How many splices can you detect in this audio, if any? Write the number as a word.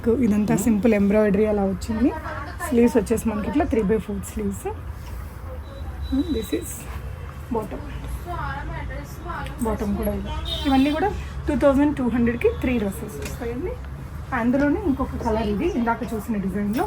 zero